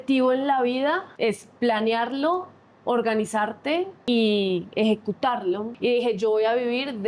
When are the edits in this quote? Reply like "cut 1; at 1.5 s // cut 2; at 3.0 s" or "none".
cut 1; at 1.1 s // cut 2; at 3.9 s // cut 3; at 5.7 s